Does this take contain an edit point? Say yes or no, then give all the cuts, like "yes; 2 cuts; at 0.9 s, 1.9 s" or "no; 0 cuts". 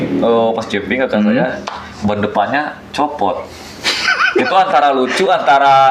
no; 0 cuts